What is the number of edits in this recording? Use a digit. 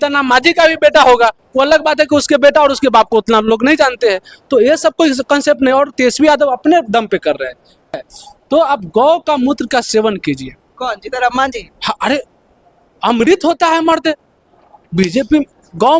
1